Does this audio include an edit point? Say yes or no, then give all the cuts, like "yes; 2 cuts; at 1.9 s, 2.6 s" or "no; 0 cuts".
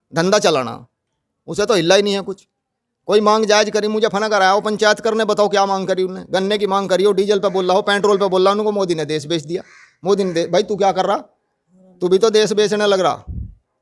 no; 0 cuts